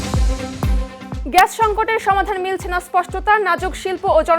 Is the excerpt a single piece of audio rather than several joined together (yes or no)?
no